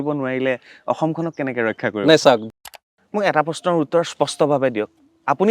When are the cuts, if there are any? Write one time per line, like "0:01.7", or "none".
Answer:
0:02.5